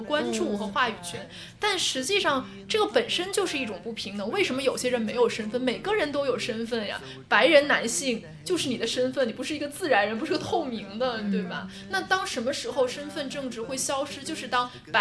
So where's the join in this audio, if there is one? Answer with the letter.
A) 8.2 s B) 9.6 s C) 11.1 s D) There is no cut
D